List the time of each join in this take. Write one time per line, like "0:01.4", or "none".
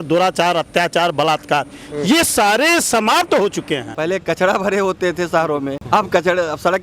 0:03.9
0:05.8